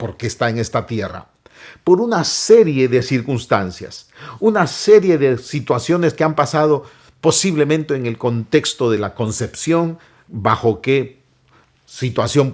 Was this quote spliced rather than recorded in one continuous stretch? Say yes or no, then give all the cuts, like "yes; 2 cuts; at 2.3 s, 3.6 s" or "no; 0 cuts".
no; 0 cuts